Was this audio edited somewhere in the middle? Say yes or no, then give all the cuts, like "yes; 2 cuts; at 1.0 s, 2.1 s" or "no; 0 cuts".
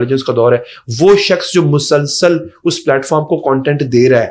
no; 0 cuts